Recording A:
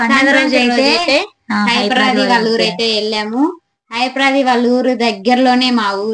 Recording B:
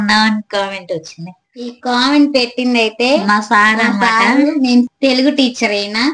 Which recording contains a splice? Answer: B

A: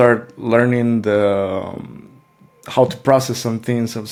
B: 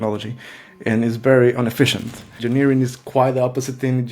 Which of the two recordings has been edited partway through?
B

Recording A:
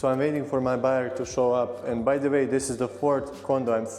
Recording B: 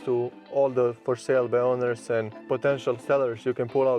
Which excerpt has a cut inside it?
B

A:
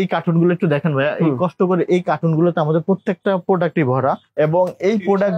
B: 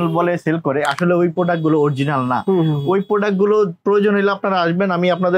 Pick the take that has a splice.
A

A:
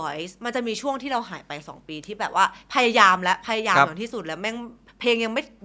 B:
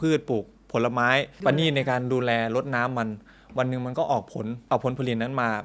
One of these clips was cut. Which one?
B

